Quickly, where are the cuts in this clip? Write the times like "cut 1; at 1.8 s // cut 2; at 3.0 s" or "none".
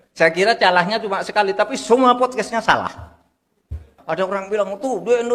cut 1; at 3.9 s